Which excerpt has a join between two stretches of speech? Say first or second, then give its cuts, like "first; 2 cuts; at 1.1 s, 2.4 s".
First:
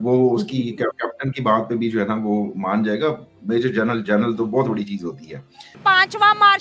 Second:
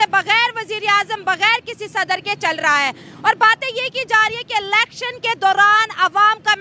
first; 1 cut; at 5.7 s